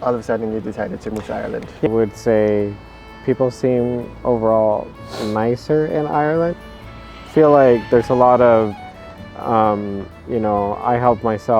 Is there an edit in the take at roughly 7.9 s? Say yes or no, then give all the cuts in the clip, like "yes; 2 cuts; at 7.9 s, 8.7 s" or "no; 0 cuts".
no; 1 cut; at 1.9 s